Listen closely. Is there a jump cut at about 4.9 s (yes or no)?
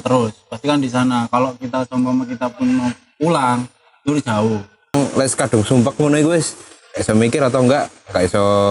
yes